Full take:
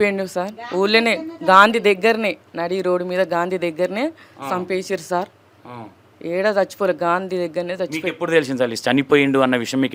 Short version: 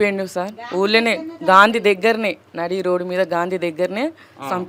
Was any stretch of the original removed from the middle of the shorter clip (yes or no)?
no